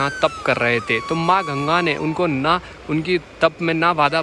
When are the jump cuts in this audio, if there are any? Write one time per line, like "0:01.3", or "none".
none